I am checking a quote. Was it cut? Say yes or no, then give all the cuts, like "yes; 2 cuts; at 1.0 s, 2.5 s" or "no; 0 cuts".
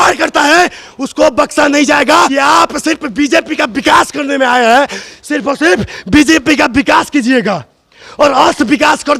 yes; 1 cut; at 2.3 s